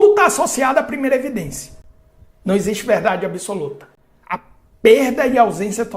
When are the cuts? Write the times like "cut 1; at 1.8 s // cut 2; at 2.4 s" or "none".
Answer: none